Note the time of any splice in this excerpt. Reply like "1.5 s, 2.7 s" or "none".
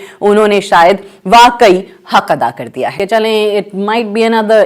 3.0 s